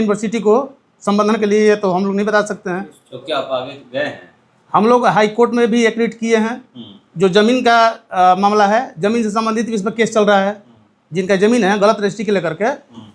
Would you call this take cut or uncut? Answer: uncut